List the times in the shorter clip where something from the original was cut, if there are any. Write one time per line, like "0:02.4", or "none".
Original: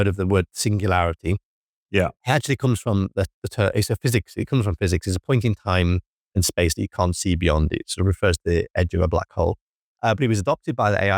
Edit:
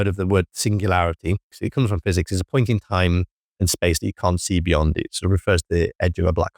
0:01.6